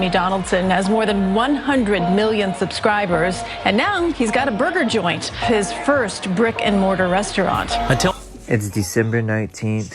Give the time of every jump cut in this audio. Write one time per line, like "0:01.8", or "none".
0:08.1

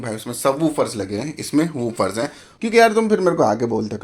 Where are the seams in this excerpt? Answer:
0:02.5

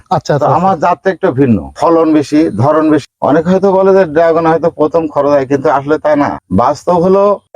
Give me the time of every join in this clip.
0:01.7
0:03.0
0:06.4

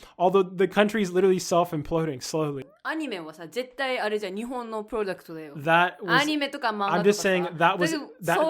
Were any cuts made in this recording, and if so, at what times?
0:02.7

